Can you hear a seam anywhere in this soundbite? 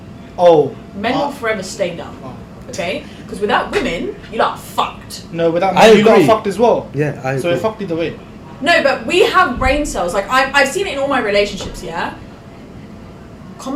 no; 0 cuts

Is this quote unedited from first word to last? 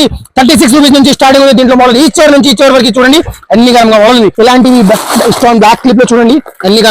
no; 1 cut; at 4.3 s

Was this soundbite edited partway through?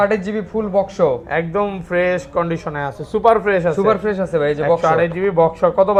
no; 0 cuts

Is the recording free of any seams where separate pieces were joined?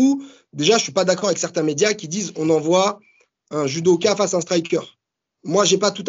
yes; 0 cuts

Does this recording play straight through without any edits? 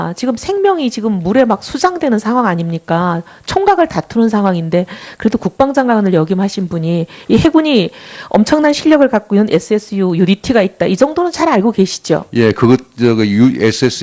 no; 1 cut; at 5.8 s

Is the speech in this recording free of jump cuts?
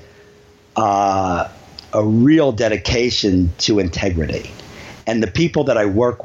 yes; 0 cuts

